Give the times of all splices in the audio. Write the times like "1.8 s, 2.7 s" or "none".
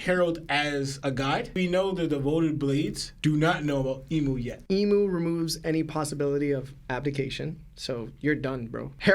4.5 s

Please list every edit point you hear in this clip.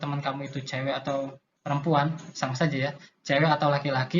1.5 s

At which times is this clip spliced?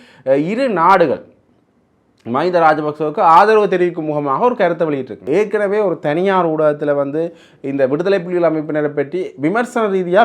5.2 s

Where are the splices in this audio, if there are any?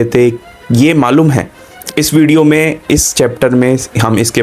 none

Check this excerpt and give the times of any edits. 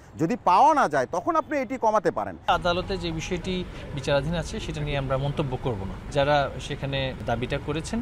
2.5 s, 6.0 s, 7.2 s

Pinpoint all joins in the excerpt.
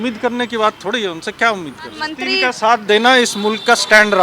2.2 s

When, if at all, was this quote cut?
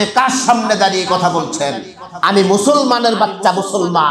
none

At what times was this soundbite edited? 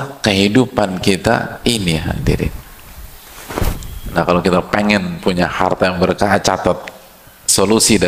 3.5 s

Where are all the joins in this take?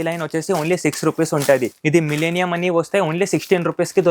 1.7 s

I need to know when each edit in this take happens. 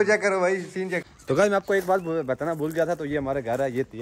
1.0 s

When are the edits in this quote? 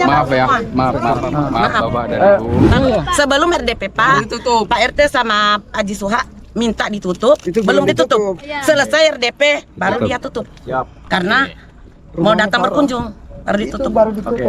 2.7 s

